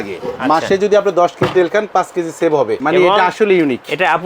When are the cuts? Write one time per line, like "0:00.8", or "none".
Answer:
0:02.8